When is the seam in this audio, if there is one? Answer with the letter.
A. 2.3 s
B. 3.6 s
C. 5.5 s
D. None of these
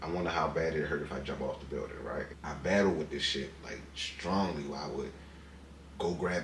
A